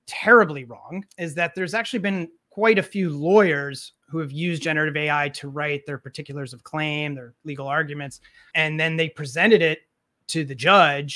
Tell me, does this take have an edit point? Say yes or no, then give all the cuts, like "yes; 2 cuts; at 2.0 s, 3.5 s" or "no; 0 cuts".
yes; 3 cuts; at 1.1 s, 2.4 s, 8.4 s